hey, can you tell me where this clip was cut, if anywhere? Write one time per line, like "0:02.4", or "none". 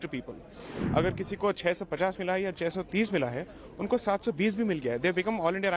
none